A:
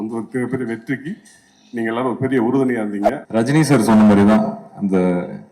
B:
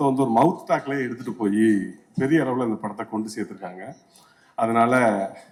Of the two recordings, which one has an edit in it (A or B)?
A